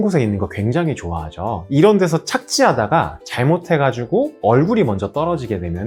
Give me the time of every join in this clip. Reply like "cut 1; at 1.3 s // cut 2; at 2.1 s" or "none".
none